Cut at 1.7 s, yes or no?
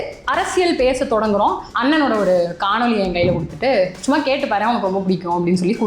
yes